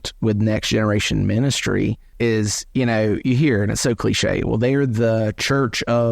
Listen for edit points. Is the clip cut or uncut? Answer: cut